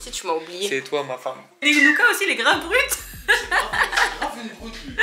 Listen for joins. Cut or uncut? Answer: cut